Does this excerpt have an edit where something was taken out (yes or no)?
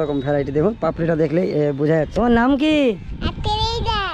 yes